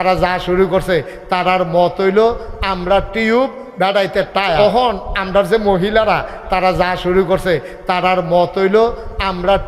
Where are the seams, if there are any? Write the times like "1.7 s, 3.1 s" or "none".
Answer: 4.6 s